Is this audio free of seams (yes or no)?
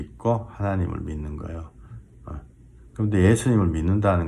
yes